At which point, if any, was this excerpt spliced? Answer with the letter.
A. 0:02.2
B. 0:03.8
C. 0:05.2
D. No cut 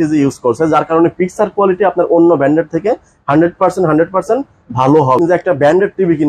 C